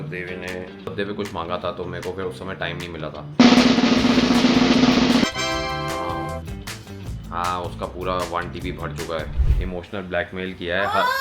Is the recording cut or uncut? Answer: cut